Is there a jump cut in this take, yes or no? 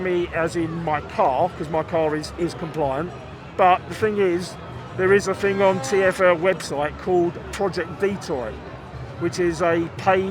no